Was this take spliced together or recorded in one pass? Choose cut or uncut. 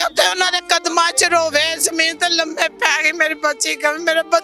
uncut